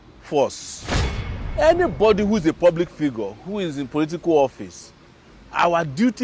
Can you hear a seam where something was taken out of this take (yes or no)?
yes